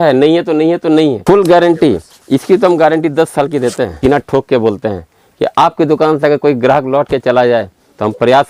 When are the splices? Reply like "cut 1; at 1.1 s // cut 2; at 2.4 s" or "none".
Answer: cut 1; at 1.2 s // cut 2; at 3.9 s

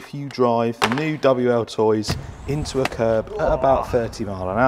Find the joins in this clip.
none

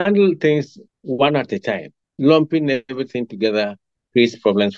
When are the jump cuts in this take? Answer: none

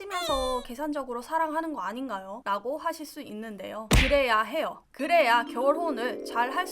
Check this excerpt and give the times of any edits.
cut 1; at 2.3 s

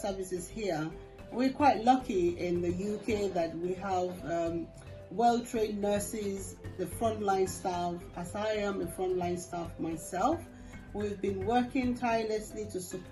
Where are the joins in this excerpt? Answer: none

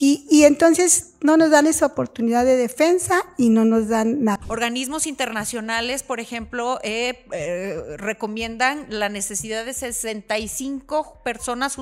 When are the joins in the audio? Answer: cut 1; at 4.4 s

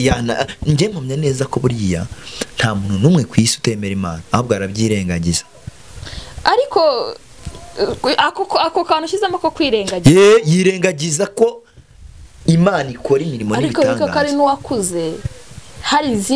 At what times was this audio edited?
none

